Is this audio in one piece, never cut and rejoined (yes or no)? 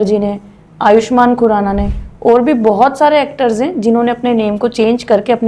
yes